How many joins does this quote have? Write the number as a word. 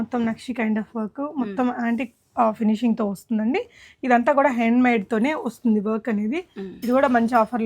zero